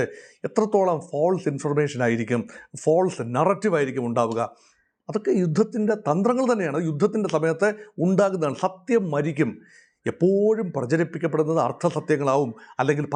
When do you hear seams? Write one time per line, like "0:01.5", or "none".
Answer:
none